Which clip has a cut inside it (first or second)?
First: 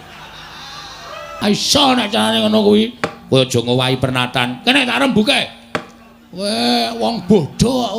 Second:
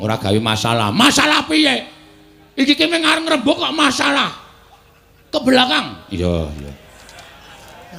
first